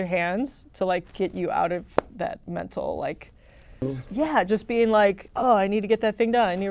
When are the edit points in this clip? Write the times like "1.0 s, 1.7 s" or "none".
3.8 s